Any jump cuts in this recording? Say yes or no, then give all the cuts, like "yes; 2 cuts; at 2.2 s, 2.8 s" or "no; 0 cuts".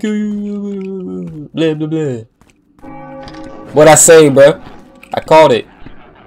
no; 0 cuts